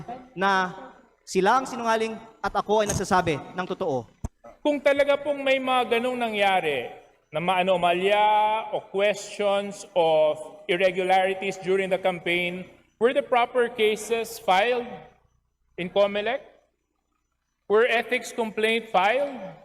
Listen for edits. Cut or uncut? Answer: cut